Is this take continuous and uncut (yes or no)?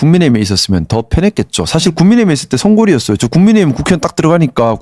yes